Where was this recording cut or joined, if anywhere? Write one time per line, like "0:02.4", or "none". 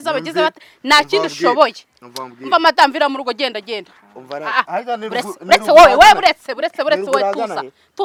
none